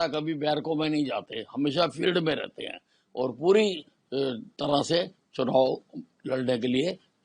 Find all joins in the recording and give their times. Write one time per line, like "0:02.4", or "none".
none